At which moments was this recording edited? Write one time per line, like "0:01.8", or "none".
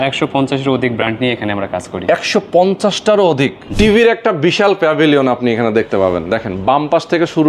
0:03.7